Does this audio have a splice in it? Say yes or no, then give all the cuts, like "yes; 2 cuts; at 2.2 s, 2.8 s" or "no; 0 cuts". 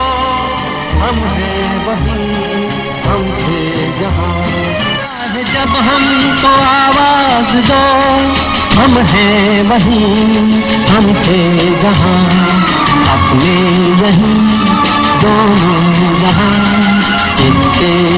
no; 0 cuts